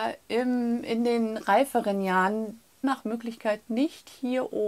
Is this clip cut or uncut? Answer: cut